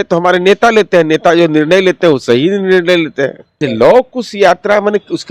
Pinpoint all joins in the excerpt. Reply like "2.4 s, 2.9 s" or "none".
3.6 s